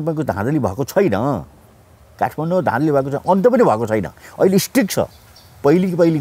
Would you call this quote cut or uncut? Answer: uncut